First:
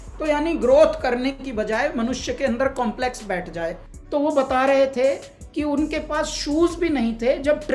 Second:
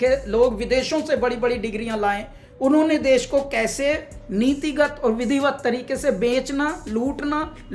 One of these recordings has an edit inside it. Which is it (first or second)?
first